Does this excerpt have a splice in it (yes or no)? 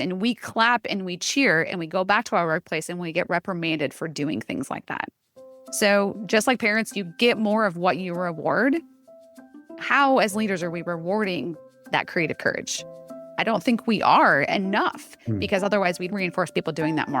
yes